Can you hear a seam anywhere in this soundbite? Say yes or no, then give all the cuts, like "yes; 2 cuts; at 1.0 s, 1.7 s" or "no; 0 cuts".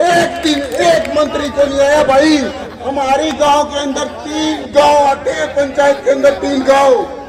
no; 0 cuts